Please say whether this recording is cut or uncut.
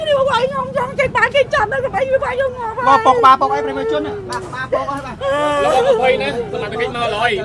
uncut